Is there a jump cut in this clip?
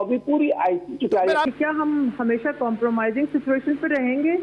yes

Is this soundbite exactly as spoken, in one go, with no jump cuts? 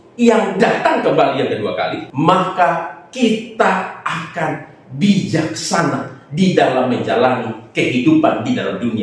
no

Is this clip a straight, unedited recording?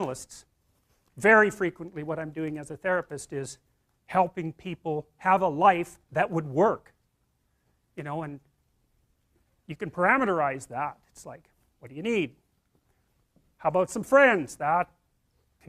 no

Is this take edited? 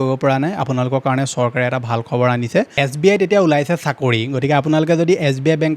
yes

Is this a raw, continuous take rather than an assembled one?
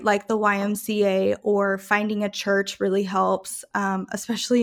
yes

